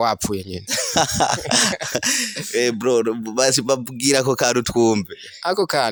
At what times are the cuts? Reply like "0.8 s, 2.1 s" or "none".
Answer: none